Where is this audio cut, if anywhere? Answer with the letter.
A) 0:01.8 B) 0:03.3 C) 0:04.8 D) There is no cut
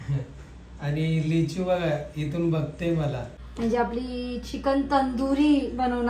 B